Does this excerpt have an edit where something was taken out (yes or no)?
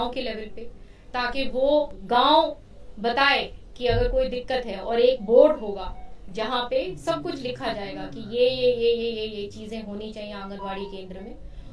yes